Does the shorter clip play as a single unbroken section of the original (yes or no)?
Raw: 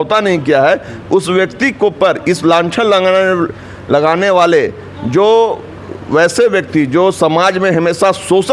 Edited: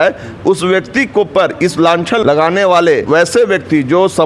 no